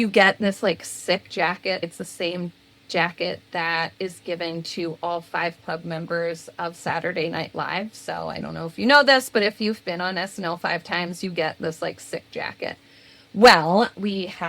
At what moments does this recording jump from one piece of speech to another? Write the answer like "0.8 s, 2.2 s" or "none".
1.8 s